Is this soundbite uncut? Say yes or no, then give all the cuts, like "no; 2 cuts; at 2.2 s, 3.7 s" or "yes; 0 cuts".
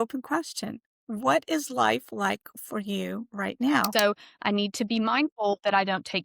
no; 1 cut; at 3.9 s